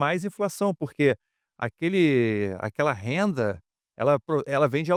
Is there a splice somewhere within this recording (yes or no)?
no